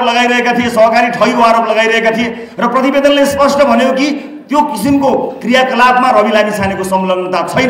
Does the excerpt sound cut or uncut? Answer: uncut